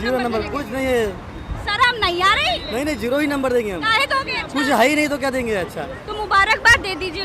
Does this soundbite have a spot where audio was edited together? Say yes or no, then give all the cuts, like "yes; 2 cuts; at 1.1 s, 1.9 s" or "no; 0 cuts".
yes; 1 cut; at 5.9 s